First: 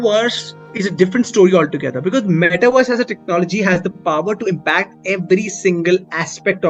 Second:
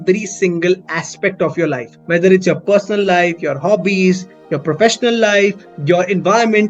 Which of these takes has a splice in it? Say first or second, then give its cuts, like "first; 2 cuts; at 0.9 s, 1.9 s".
second; 1 cut; at 5.7 s